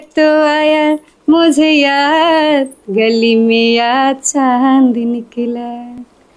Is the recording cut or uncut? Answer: uncut